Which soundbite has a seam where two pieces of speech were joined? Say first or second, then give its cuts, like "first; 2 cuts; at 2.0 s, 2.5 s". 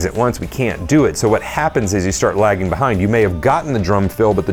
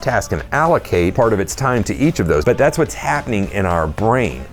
second; 2 cuts; at 1.1 s, 2.4 s